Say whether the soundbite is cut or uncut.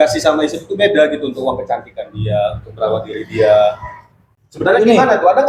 uncut